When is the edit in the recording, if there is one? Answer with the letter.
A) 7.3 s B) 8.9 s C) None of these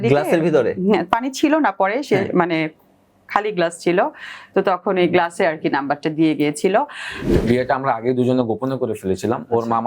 A